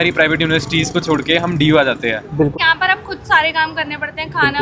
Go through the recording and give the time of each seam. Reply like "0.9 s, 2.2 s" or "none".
2.5 s

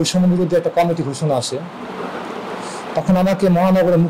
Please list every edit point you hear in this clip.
none

